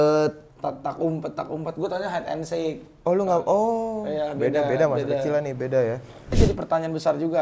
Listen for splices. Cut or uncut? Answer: cut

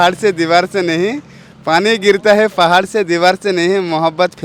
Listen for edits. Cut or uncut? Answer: uncut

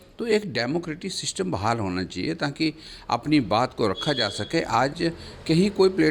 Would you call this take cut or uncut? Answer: uncut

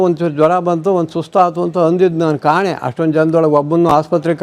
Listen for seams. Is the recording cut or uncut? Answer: uncut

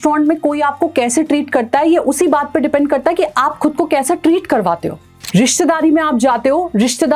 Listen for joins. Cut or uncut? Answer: uncut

